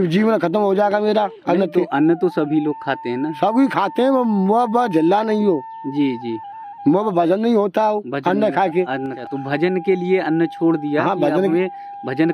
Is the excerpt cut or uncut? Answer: cut